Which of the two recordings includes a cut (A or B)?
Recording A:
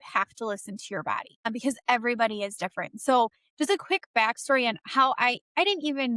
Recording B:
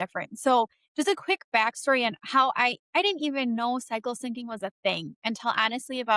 A